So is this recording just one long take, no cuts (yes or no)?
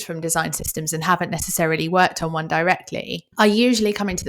no